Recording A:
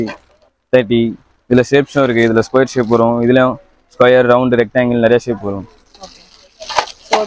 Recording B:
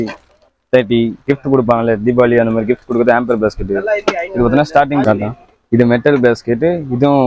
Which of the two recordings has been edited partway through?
B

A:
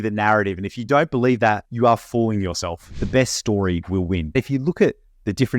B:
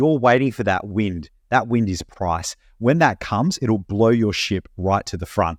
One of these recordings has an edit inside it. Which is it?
A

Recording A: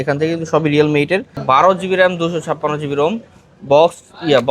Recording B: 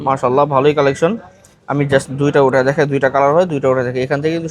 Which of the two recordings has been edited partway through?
A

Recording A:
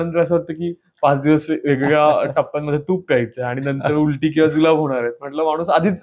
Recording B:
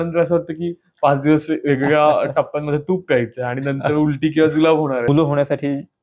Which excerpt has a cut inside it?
B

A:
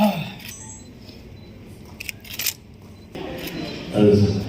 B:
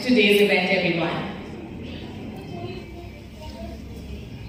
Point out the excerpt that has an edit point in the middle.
A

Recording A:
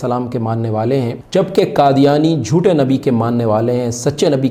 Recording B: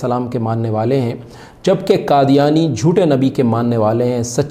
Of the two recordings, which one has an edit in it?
A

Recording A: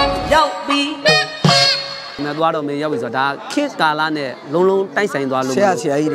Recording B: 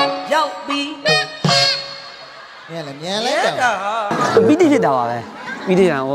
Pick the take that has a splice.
A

